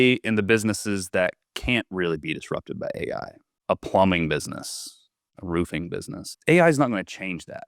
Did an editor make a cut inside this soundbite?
yes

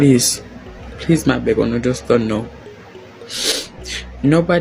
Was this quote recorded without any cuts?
yes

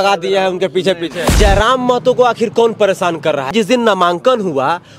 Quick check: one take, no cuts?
no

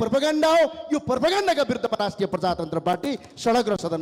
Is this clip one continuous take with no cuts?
yes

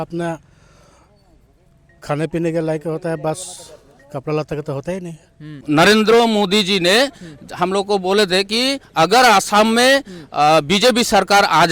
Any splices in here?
yes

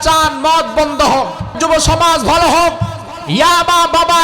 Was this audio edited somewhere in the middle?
yes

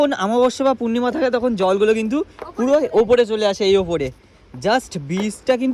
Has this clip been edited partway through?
no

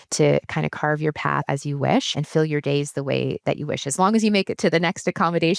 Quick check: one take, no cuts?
no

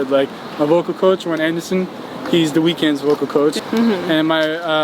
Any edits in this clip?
yes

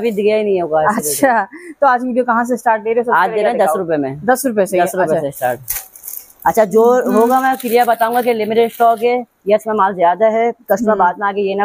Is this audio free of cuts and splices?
yes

